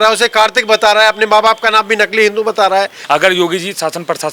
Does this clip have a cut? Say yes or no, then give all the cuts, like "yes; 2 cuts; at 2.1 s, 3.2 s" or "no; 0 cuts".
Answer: yes; 1 cut; at 3.0 s